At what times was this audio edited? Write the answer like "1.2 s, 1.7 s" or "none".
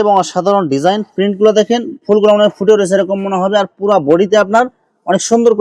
none